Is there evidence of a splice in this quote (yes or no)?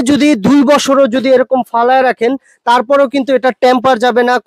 no